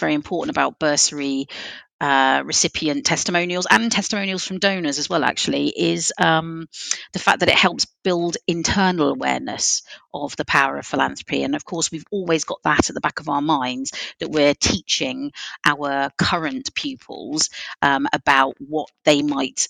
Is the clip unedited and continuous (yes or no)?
yes